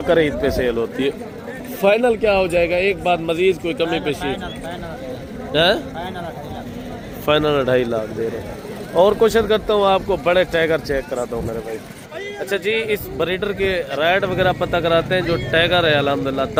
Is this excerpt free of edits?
yes; 0 cuts

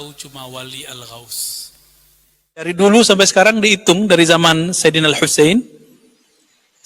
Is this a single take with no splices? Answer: no; 1 cut; at 2.7 s

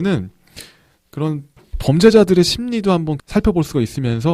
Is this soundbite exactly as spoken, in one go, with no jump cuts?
no; 1 cut; at 3.2 s

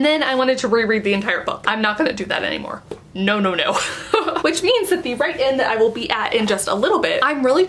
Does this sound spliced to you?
no; 0 cuts

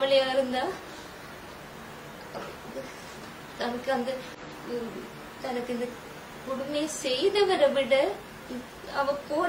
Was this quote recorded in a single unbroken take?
yes; 0 cuts

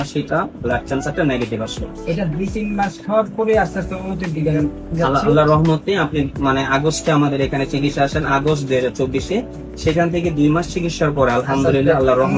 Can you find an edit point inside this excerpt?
no; 0 cuts

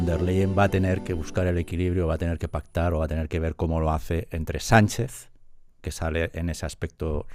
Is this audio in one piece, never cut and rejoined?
yes; 0 cuts

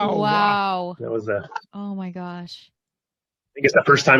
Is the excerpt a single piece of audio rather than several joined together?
yes; 0 cuts

